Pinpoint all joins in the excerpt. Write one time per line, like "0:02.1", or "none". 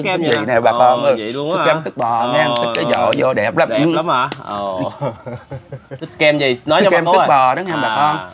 0:06.0